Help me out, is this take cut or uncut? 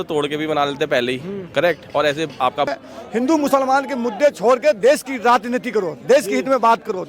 cut